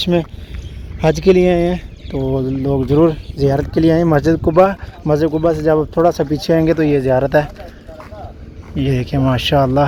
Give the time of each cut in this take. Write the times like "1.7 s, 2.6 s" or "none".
none